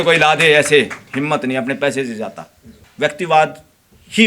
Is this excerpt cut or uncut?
cut